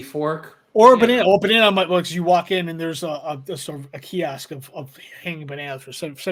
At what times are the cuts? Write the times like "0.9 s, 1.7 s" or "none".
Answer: none